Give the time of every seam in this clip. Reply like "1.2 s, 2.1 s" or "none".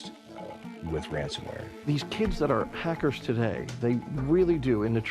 1.9 s